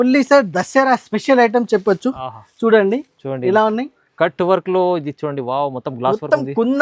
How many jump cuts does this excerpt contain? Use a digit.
0